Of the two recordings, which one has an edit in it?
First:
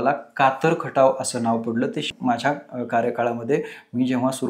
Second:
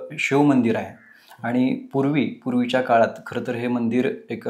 first; 1 cut; at 2.1 s

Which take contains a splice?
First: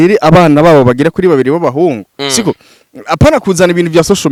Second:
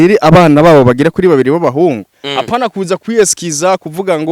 second; 1 cut; at 2.1 s

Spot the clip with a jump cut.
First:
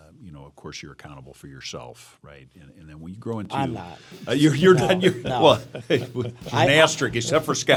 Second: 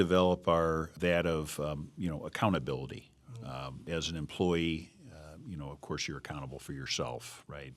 second; 2 cuts; at 0.9 s, 3.9 s

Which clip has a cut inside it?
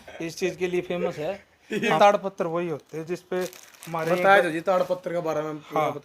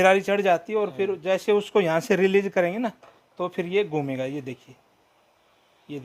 first; 1 cut; at 2.0 s

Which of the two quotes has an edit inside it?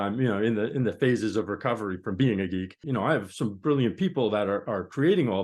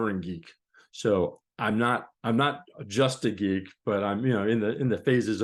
first; 1 cut; at 2.8 s

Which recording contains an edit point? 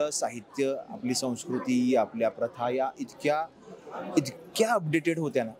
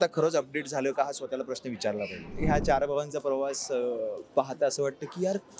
second; 1 cut; at 2.3 s

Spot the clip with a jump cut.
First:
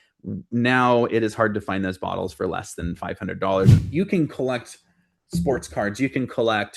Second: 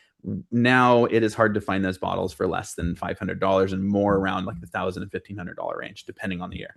first; 1 cut; at 3.8 s

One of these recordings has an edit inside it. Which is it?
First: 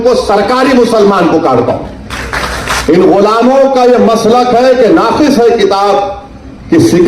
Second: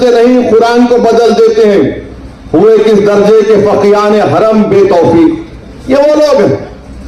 first; 1 cut; at 2.7 s

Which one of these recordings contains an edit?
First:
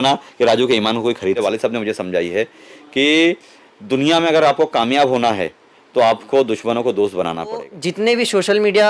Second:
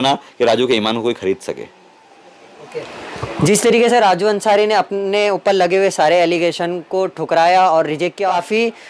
first; 2 cuts; at 1.4 s, 7.7 s

